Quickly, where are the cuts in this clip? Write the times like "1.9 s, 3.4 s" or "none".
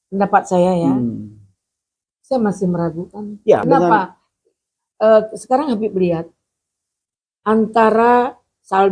3.6 s